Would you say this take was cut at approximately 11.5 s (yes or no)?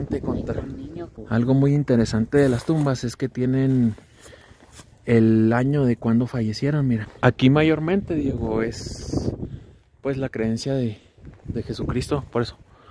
no